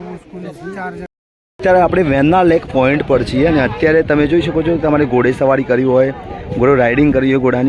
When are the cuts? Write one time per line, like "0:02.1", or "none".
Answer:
0:01.1